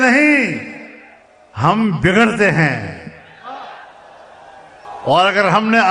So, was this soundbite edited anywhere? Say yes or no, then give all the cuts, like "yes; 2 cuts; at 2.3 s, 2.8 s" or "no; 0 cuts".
yes; 1 cut; at 4.9 s